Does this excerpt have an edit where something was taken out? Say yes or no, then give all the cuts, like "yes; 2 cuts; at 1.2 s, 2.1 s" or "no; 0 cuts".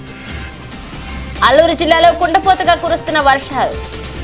yes; 1 cut; at 1.0 s